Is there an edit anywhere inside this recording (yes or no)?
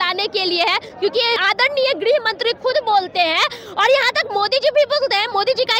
yes